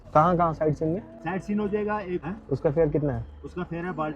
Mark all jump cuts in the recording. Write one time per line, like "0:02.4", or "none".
0:01.1
0:02.3